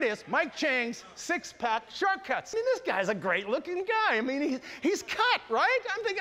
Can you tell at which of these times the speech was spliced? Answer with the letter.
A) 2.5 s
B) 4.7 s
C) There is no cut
A